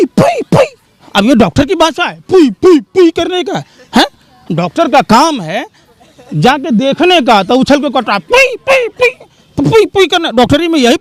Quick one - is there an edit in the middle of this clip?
no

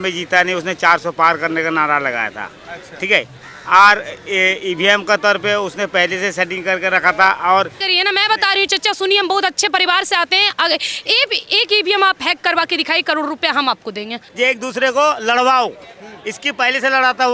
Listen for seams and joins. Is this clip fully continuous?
no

